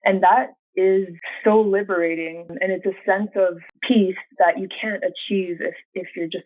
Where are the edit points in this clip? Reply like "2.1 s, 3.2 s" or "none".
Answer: 1.2 s, 2.5 s